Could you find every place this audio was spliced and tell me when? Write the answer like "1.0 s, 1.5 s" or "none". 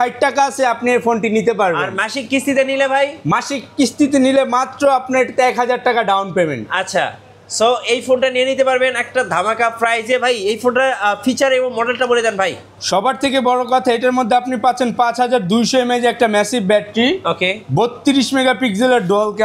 none